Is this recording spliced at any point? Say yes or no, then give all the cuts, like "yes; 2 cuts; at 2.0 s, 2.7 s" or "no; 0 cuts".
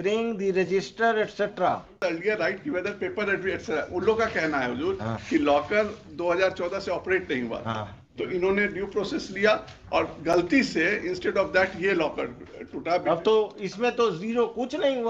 yes; 1 cut; at 2.0 s